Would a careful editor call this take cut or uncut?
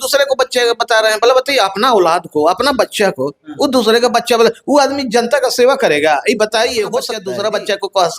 cut